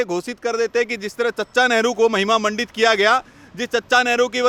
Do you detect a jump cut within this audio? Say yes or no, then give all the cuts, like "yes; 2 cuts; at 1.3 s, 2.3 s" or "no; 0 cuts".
no; 0 cuts